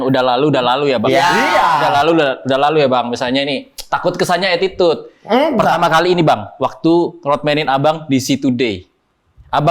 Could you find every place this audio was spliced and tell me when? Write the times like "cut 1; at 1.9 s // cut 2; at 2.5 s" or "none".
none